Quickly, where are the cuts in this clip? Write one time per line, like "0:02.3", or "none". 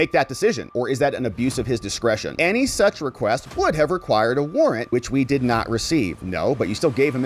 0:02.3